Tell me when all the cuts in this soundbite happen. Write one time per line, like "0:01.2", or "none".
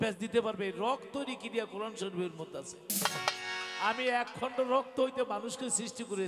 none